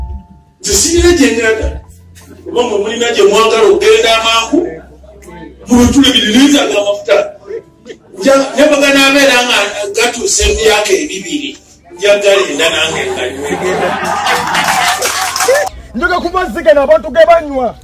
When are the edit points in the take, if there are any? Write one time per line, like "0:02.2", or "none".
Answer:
0:15.8